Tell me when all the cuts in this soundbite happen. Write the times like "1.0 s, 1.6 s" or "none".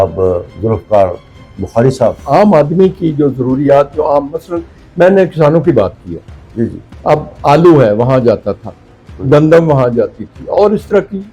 2.2 s

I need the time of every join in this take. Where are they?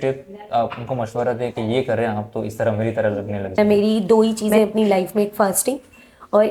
3.6 s

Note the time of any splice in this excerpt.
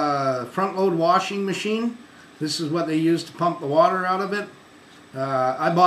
2.2 s

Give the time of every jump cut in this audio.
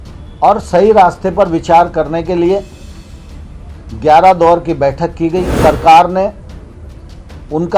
5.5 s

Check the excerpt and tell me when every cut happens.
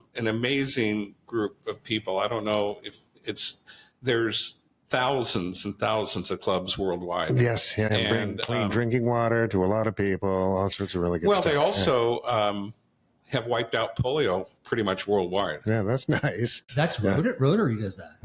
7.9 s, 16.7 s

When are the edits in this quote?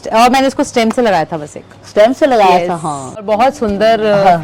3.2 s

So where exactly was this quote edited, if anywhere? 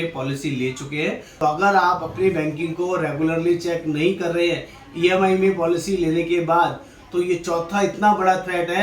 1.3 s

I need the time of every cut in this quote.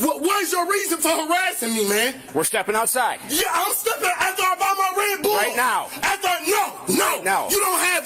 2.2 s

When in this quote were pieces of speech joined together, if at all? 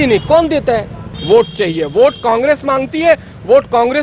1.1 s

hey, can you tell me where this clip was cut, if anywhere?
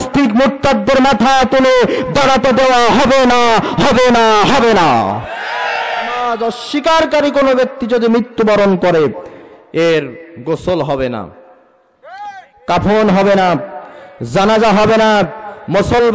6.2 s

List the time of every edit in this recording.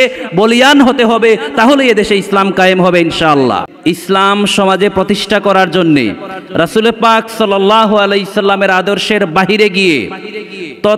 3.7 s

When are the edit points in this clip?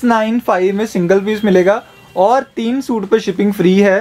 none

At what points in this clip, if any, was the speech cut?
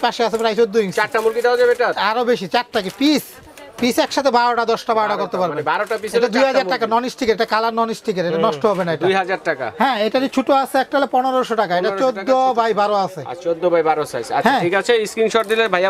none

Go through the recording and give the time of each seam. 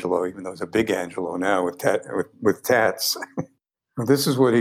3.3 s

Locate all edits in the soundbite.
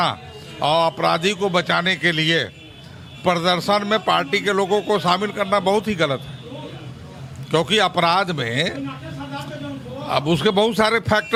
none

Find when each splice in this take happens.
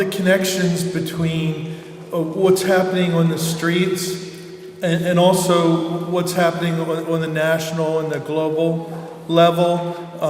none

